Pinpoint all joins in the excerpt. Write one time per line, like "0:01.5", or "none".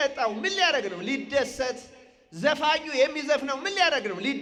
none

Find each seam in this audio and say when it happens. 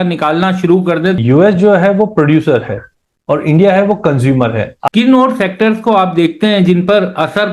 0:01.2
0:04.8

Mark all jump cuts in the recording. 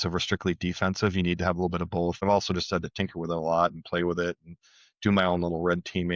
0:02.2

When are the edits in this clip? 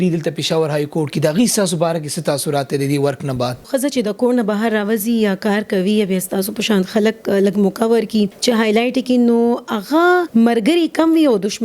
0:03.7
0:08.4
0:10.3

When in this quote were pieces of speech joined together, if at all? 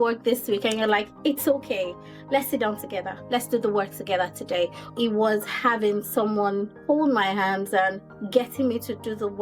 0:04.9
0:06.7
0:08.1

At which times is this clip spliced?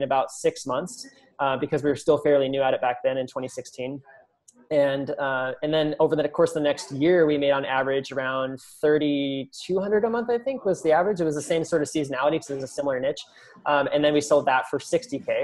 none

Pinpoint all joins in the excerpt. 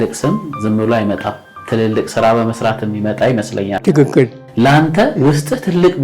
none

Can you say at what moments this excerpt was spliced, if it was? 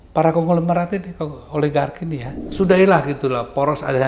0:02.4

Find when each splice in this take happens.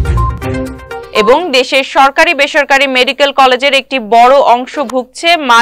0:01.0

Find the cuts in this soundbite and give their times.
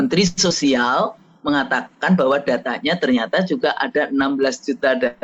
none

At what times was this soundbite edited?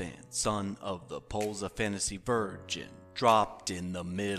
none

